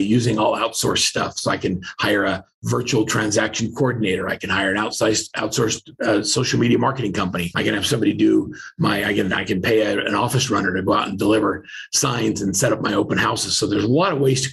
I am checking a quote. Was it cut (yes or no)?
yes